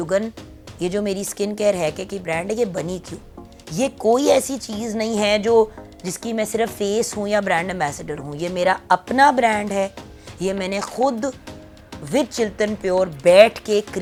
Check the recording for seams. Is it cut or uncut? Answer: uncut